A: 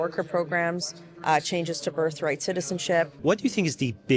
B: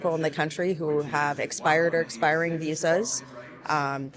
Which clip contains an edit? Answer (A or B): A